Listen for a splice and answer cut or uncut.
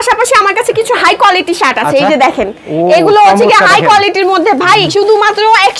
uncut